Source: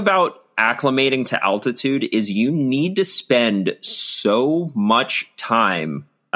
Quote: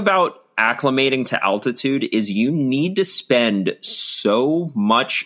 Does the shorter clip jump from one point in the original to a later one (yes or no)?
no